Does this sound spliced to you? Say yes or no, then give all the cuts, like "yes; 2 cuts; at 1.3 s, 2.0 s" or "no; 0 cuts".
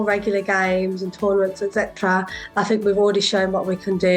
no; 0 cuts